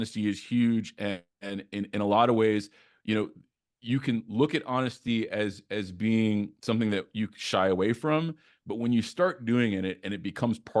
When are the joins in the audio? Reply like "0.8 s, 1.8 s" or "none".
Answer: none